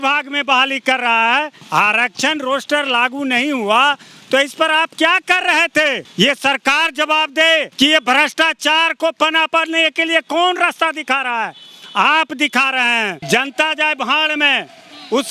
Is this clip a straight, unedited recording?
no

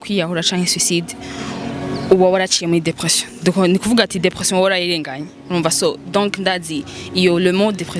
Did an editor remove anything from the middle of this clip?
no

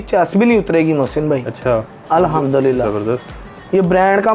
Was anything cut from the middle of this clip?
no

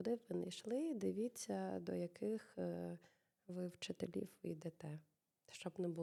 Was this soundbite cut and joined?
no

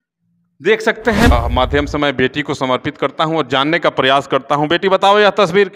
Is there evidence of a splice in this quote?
yes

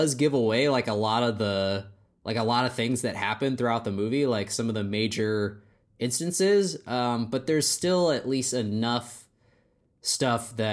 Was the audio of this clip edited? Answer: no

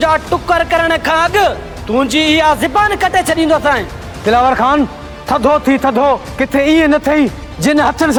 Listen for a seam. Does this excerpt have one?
no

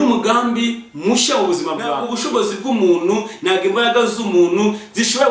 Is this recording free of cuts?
no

